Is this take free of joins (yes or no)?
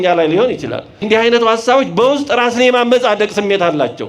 no